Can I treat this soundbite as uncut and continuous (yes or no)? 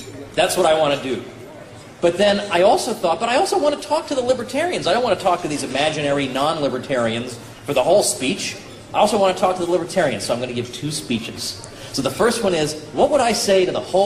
yes